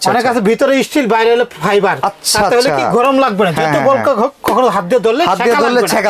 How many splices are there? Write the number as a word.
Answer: zero